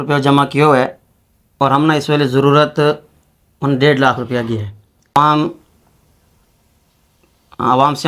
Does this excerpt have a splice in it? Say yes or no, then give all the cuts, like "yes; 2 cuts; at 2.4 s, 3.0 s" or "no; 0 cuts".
yes; 1 cut; at 5.1 s